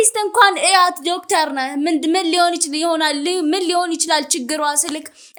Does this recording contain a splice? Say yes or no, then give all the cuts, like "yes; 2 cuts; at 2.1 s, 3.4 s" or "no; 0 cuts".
no; 0 cuts